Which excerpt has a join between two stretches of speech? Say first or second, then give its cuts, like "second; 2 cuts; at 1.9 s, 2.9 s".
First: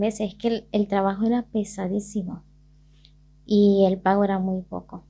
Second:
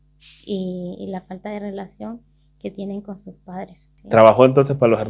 second; 1 cut; at 3.9 s